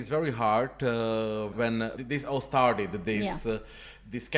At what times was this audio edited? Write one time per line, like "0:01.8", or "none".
0:01.5